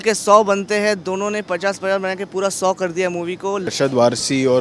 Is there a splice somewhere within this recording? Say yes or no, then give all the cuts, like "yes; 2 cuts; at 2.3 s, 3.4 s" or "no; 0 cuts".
yes; 1 cut; at 3.7 s